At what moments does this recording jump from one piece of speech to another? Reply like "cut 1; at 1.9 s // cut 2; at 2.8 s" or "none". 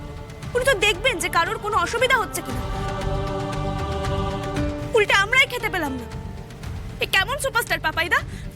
none